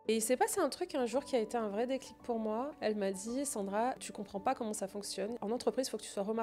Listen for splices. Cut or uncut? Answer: cut